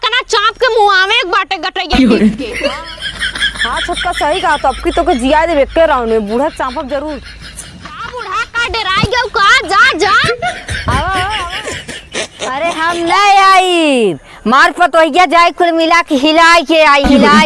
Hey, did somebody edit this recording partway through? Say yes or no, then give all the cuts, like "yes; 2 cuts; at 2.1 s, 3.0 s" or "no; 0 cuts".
no; 0 cuts